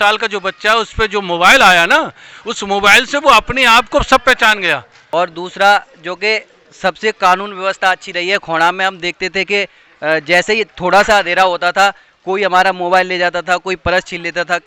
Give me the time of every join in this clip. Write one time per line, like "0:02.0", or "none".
0:05.0